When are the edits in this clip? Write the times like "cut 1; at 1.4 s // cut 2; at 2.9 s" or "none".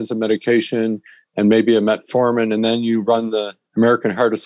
none